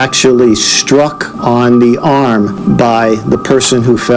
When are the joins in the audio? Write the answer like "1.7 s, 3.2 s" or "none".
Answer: 1.3 s, 2.6 s